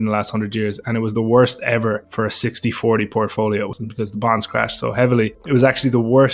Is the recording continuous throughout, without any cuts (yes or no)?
no